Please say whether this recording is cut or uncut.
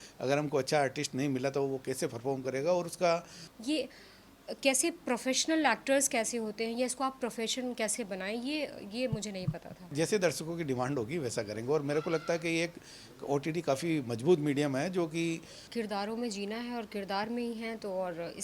cut